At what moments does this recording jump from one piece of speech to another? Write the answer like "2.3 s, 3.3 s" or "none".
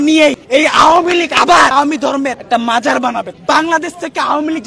1.7 s, 3.4 s